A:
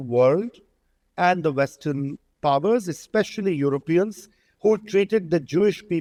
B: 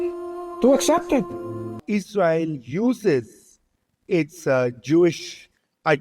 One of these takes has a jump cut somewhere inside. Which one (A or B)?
B